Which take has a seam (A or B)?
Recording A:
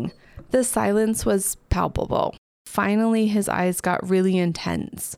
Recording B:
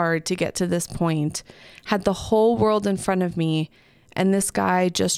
A